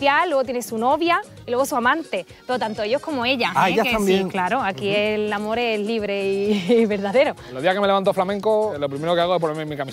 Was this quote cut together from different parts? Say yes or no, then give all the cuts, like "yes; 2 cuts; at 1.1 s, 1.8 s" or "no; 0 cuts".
yes; 2 cuts; at 7.5 s, 8.8 s